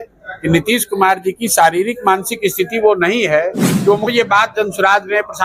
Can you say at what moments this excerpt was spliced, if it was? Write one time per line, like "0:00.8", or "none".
0:04.1

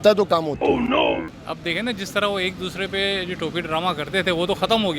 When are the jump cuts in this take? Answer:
none

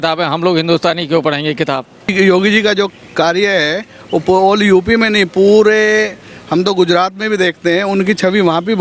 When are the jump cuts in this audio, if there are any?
0:02.1

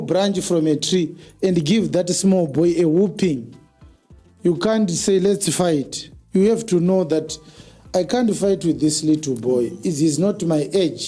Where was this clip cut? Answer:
none

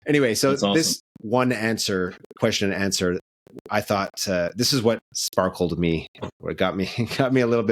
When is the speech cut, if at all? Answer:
0:01.1
0:05.1

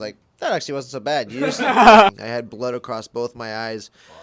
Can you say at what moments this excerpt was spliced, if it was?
0:02.2

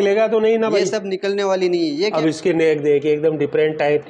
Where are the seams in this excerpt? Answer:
0:02.1

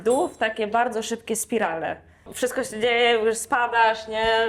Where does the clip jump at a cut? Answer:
0:02.3

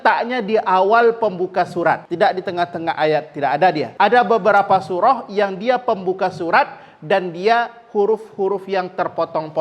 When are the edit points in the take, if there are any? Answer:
0:02.1
0:03.9

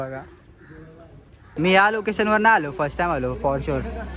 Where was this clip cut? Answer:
0:01.5

